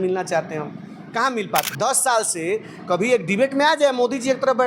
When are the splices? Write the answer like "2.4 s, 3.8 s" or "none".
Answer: 1.7 s